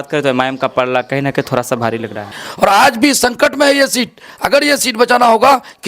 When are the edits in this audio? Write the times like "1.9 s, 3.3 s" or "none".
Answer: 2.4 s